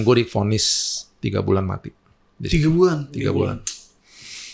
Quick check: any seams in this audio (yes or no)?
no